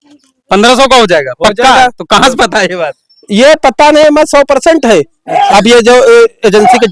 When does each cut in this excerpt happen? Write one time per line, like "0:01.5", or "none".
none